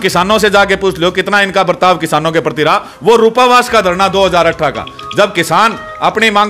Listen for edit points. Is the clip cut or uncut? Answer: uncut